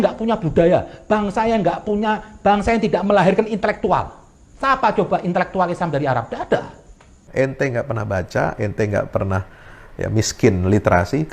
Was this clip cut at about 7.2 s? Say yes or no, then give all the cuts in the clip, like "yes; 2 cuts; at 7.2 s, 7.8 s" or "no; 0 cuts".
yes; 1 cut; at 7.2 s